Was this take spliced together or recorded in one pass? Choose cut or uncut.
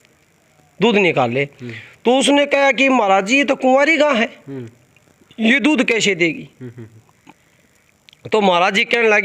uncut